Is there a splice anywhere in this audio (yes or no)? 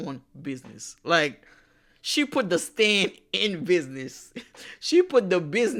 no